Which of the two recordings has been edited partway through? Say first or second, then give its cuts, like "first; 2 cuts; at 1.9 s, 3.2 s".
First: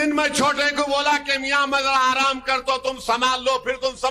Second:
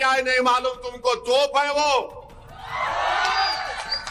first; 1 cut; at 2.6 s